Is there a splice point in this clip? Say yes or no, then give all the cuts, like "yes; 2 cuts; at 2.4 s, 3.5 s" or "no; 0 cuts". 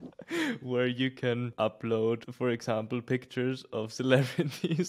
yes; 2 cuts; at 1.5 s, 2.3 s